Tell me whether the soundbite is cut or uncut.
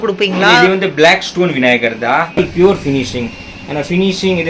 cut